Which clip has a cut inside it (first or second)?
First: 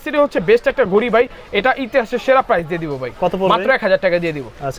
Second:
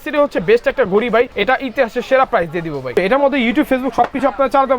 second